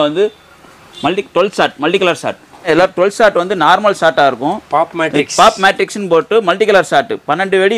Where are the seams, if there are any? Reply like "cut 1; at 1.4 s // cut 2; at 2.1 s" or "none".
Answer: cut 1; at 2.7 s

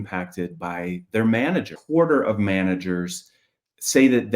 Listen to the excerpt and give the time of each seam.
cut 1; at 1.8 s

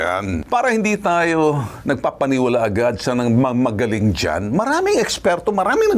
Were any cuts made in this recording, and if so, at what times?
none

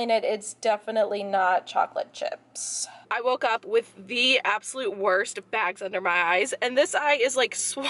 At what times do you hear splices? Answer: cut 1; at 3.0 s

